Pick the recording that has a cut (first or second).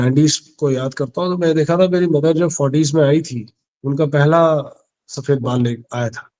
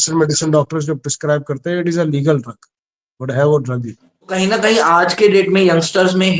second